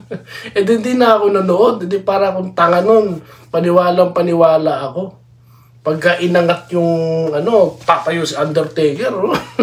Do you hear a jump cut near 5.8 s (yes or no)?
no